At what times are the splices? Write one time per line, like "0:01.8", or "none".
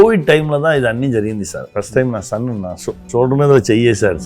0:01.6
0:03.0